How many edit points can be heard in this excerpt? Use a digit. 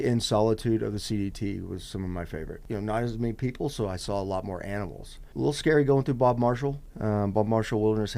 3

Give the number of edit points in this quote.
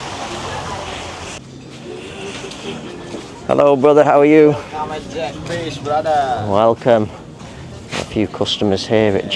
1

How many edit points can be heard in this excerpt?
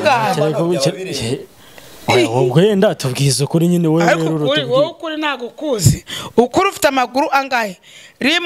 0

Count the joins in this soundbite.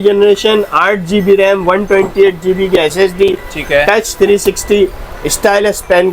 0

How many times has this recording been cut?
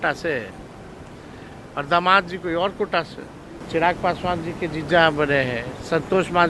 1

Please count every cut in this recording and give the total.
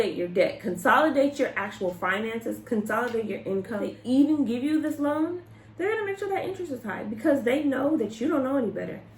1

